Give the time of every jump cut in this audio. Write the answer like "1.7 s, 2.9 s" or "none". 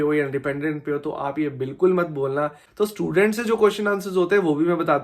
2.6 s